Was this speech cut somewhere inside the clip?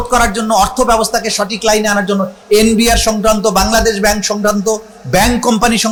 no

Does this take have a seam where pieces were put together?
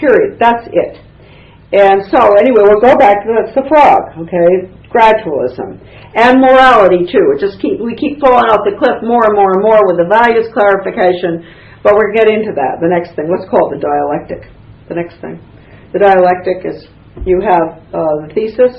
no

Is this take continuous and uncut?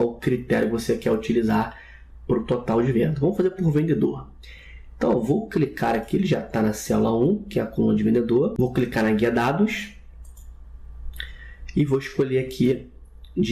yes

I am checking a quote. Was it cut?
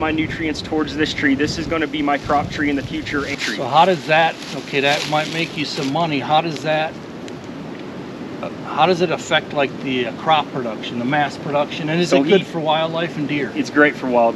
yes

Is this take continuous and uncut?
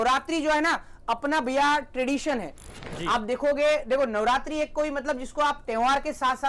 yes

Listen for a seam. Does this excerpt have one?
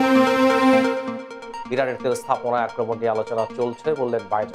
no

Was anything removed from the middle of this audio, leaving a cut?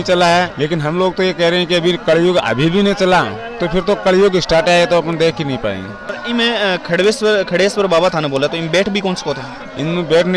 no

